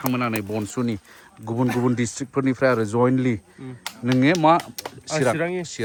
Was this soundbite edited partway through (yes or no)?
no